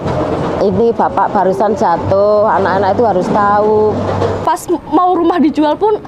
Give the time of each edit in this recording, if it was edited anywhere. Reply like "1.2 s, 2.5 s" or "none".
4.4 s